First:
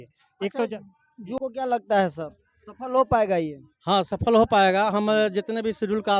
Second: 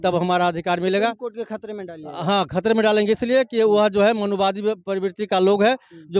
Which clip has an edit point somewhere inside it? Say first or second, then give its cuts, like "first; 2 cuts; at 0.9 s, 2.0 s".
first; 1 cut; at 1.4 s